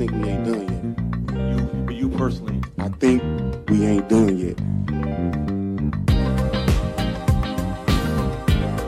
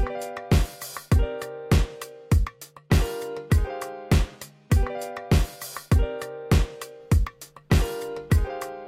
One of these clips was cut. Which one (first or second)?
second